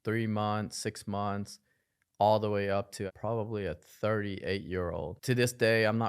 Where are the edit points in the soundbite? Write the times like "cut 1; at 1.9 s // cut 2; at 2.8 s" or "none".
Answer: cut 1; at 3.1 s // cut 2; at 5.2 s

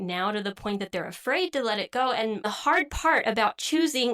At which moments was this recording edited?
cut 1; at 2.5 s

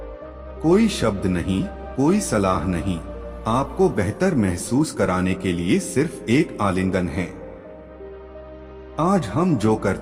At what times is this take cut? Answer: cut 1; at 7.5 s // cut 2; at 9.0 s

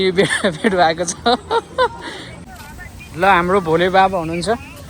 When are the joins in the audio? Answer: cut 1; at 2.5 s

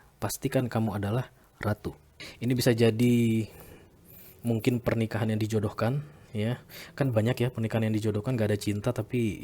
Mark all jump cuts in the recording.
cut 1; at 2.3 s

